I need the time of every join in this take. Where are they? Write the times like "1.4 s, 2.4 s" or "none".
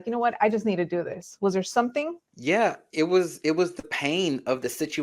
2.3 s